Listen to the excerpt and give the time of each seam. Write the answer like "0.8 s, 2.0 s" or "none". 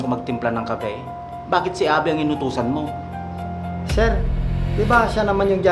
none

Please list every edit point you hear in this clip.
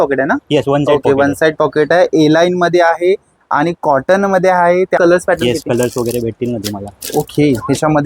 5.0 s

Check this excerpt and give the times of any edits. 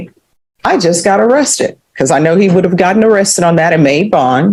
none

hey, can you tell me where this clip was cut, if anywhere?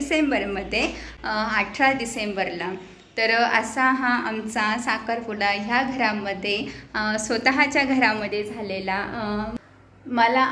none

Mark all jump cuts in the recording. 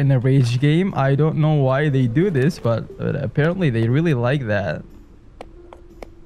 none

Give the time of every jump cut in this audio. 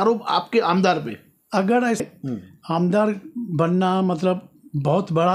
2.0 s

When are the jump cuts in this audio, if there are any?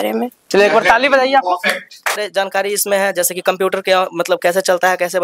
2.2 s

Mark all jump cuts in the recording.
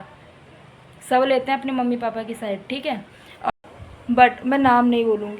3.5 s

